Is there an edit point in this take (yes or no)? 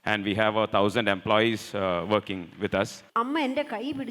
yes